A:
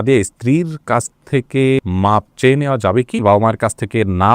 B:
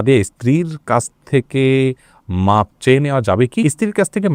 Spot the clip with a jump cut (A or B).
A